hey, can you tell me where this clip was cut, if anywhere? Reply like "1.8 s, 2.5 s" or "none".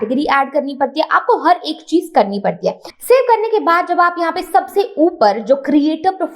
2.9 s

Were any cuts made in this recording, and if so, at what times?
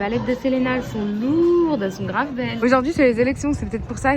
2.5 s

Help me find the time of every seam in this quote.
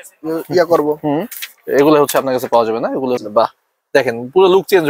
3.2 s

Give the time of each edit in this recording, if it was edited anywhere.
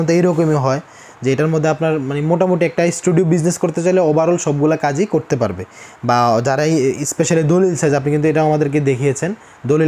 none

